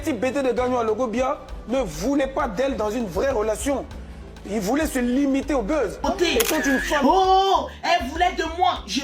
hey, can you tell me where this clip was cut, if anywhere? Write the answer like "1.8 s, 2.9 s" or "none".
7.0 s